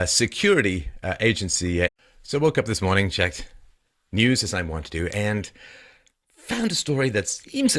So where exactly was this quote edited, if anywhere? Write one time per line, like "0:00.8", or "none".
none